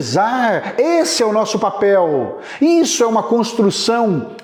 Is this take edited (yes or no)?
no